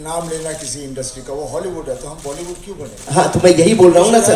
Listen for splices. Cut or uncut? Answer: uncut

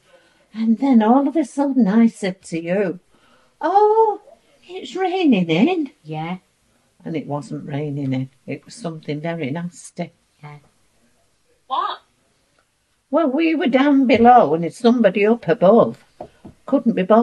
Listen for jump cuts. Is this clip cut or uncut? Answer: uncut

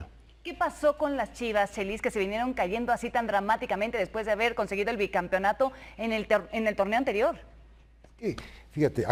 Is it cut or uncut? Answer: uncut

